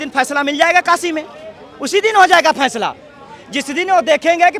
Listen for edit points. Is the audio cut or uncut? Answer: uncut